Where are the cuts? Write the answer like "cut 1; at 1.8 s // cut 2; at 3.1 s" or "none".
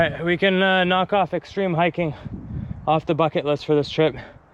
none